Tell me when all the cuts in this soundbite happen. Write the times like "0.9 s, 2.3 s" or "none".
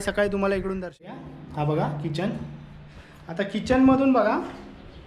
1.2 s